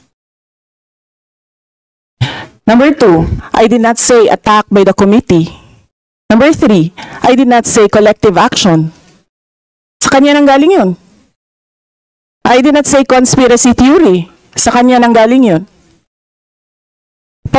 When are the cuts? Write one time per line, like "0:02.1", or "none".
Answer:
none

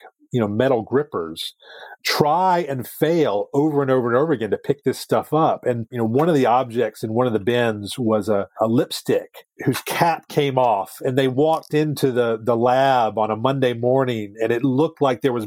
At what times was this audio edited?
0:05.9
0:09.5

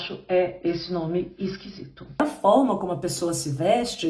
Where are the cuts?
0:02.2

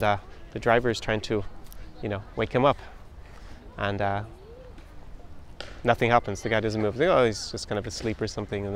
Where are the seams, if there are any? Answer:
none

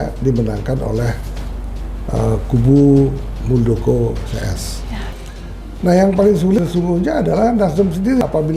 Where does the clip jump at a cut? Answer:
0:05.2

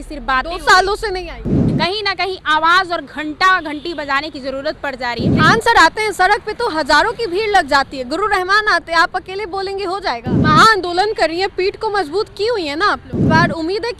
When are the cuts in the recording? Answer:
0:01.5
0:05.3
0:10.3
0:13.1

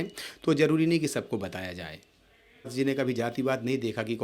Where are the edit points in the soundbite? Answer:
0:02.7

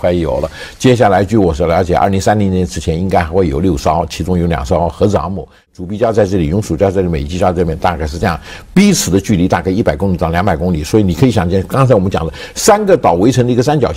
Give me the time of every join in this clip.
0:05.7

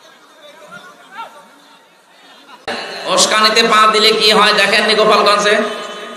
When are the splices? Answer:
0:02.7

